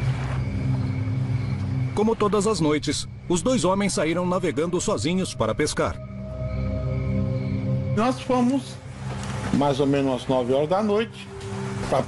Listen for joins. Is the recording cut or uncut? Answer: cut